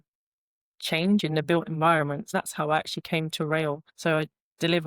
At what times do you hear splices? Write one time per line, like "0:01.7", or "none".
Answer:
0:02.3
0:03.9